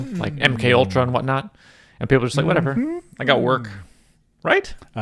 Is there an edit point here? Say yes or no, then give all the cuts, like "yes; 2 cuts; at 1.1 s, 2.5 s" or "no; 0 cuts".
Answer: no; 0 cuts